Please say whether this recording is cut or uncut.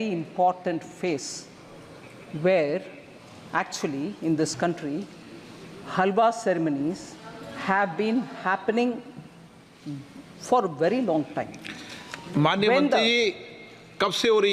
uncut